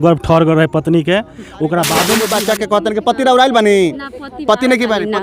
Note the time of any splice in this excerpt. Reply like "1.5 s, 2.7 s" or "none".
2.2 s